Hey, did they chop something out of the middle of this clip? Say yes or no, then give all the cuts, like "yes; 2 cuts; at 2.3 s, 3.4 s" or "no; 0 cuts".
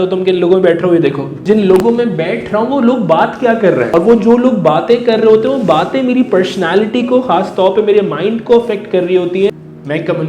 yes; 3 cuts; at 1.3 s, 3.9 s, 9.5 s